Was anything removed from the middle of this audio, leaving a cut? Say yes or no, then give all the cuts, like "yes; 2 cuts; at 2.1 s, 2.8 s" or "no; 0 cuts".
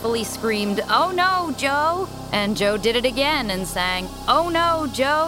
yes; 2 cuts; at 2.2 s, 4.1 s